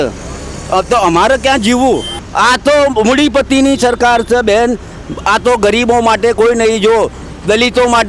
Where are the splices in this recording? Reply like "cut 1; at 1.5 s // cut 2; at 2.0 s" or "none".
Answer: cut 1; at 2.2 s

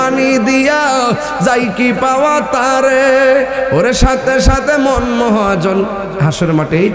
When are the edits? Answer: none

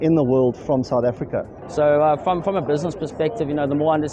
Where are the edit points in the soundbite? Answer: cut 1; at 1.6 s

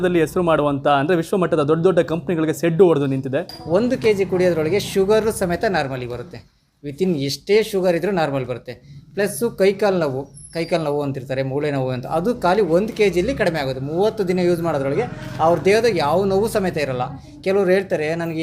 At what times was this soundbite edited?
cut 1; at 3.5 s

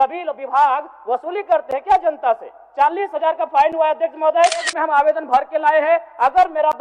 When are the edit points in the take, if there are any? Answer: cut 1; at 4.7 s

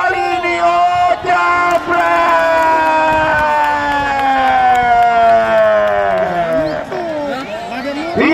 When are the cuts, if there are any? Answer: cut 1; at 6.6 s

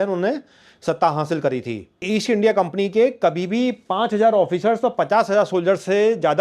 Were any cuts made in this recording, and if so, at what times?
cut 1; at 2.0 s

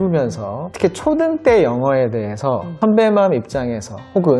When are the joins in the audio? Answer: none

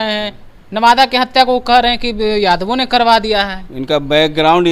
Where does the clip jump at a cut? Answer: none

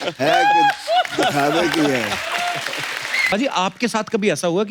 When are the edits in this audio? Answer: cut 1; at 3.3 s

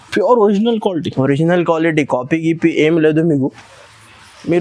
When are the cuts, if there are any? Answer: none

